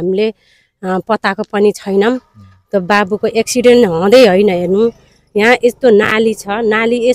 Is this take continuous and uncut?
yes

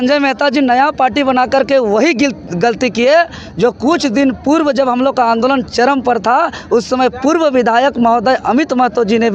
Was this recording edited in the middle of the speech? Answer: no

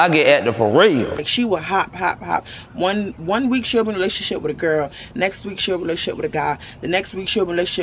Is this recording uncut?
no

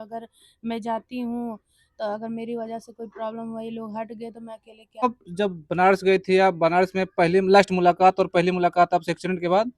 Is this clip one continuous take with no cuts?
no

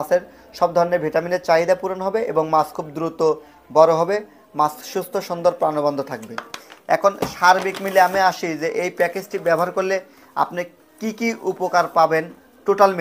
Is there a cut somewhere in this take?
no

